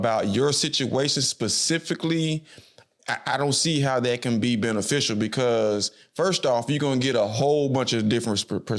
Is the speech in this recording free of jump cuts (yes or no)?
yes